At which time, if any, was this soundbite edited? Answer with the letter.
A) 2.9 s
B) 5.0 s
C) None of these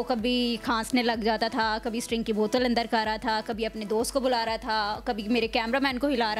C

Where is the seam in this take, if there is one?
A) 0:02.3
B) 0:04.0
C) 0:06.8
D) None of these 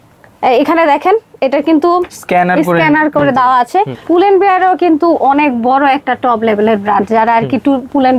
B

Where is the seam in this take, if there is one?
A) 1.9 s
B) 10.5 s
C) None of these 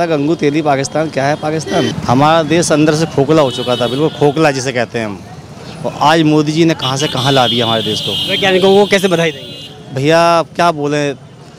A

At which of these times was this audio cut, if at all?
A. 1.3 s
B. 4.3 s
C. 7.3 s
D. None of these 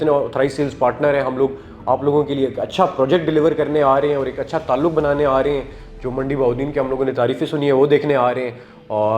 D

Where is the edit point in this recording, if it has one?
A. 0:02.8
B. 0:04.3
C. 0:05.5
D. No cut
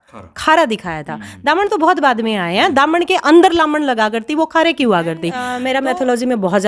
C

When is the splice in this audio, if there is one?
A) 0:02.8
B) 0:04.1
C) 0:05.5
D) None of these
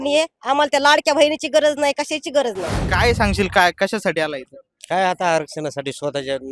A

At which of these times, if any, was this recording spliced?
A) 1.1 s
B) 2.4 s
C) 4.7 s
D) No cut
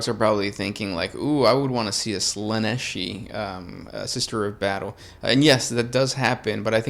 D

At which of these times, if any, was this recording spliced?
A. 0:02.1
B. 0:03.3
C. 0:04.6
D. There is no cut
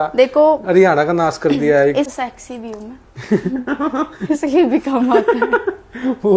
A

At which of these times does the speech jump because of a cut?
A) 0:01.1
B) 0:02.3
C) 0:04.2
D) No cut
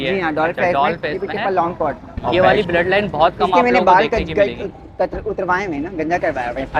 B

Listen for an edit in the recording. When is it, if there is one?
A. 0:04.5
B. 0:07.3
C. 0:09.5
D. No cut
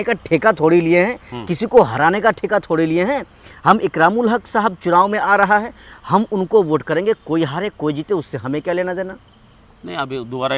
D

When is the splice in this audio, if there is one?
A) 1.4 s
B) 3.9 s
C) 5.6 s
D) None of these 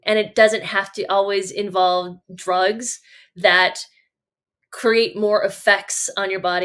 D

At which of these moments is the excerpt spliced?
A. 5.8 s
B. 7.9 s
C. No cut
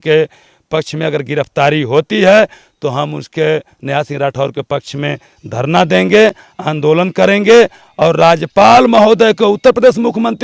C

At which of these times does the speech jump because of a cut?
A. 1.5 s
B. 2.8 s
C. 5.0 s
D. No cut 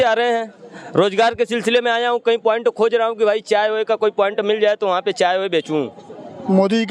D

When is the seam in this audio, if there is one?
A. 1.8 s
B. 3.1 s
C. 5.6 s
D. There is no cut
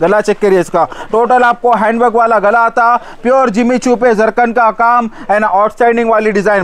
D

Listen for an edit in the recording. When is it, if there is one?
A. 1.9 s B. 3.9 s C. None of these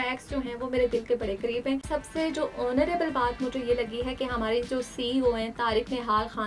A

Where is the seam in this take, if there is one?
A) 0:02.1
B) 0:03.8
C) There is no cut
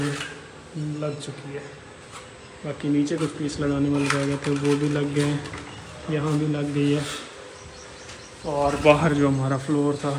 C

